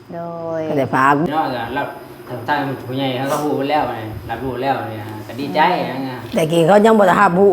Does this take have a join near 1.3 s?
yes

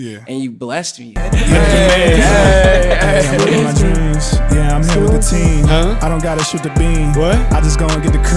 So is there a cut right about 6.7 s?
no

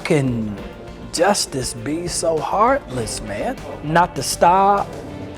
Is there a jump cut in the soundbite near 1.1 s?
no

